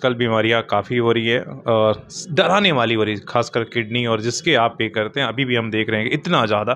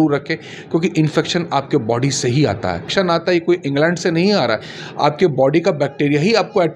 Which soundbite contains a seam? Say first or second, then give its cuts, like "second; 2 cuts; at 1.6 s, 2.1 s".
second; 1 cut; at 2.9 s